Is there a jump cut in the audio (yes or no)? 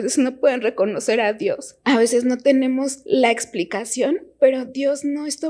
yes